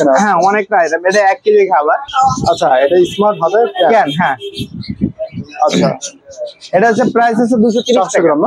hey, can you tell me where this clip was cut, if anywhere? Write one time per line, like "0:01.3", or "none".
0:02.1